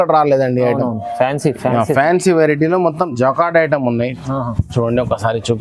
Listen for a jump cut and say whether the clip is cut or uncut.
uncut